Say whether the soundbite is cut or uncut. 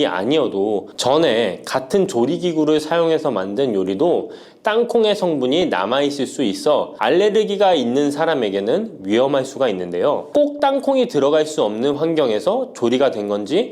cut